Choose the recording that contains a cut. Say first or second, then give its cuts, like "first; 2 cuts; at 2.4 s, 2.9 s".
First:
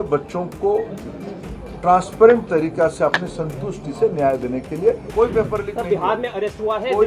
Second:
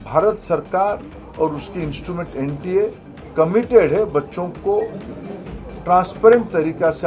first; 1 cut; at 5.1 s